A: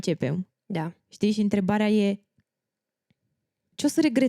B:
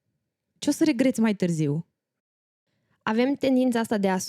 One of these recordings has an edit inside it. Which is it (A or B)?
B